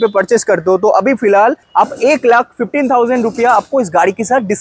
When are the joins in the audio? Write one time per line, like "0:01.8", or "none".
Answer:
0:01.6